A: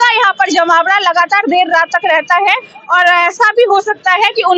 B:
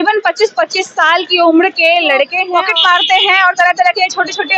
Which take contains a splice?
B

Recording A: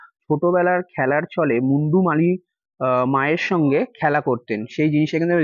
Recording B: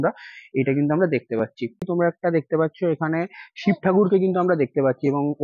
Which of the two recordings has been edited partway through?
B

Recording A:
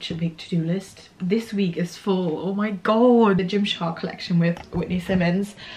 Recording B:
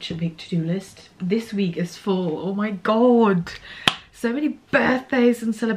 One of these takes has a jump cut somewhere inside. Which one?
A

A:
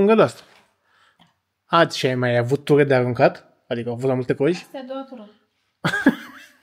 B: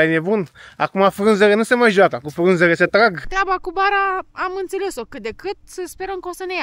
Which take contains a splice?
B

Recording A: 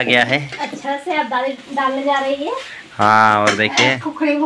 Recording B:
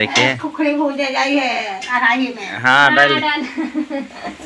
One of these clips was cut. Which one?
B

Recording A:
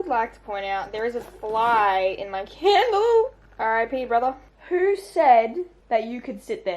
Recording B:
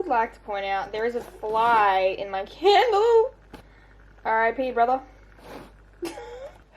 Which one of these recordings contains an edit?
A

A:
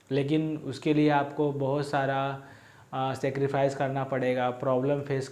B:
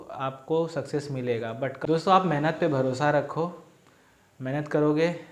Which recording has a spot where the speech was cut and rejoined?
B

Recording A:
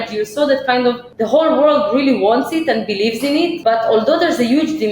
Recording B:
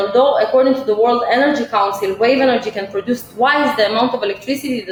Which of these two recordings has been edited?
A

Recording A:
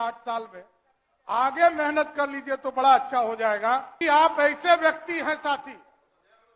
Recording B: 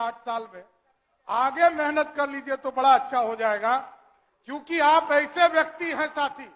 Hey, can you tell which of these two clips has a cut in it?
A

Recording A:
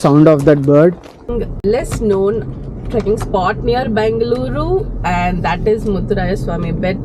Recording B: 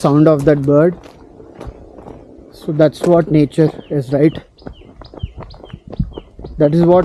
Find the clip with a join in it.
A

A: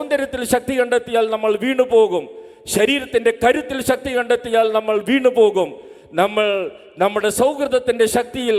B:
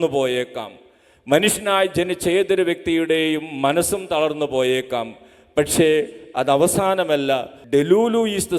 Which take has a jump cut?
B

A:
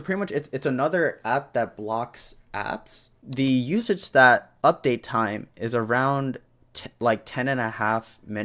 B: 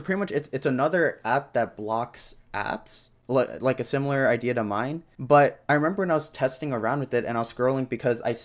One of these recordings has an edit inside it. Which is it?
A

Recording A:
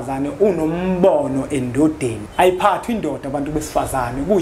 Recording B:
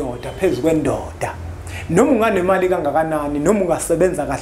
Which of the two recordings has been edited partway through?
A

